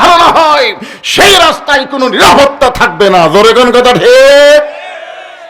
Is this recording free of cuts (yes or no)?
yes